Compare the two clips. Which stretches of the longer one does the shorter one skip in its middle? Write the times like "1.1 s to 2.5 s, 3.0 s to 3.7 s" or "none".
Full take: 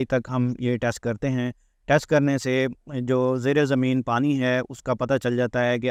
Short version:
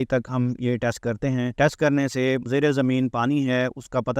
1.5 s to 1.8 s, 2.8 s to 3.4 s